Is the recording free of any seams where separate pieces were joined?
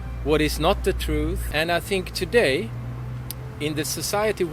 no; 1 cut; at 1.4 s

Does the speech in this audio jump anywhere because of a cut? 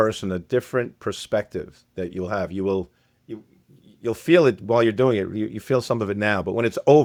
no; 0 cuts

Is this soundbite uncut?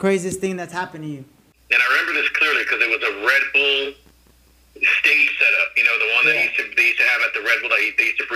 no; 1 cut; at 1.5 s

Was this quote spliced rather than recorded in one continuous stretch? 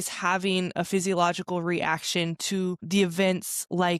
no; 0 cuts

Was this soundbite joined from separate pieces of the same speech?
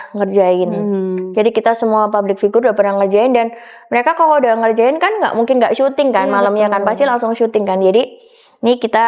no; 0 cuts

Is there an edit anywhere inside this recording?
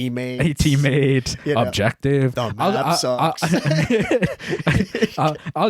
no; 0 cuts

